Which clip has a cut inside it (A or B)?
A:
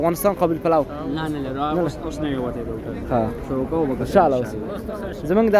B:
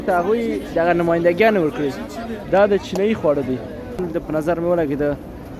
B